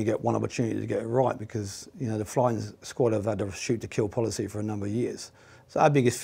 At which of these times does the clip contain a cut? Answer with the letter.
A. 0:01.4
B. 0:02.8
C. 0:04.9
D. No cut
B